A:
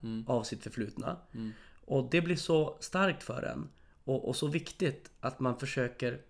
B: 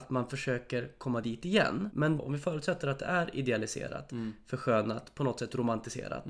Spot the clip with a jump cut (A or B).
B